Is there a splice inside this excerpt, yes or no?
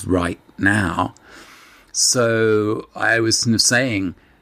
no